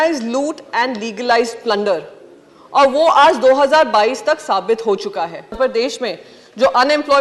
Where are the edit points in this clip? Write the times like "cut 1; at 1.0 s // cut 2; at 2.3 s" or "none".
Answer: cut 1; at 5.5 s

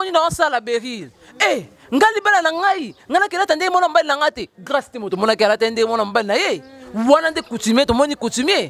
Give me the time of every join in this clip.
none

